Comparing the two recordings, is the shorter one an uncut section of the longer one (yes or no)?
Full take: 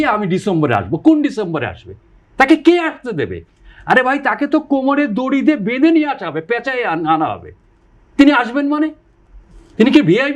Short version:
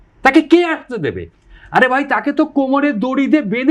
yes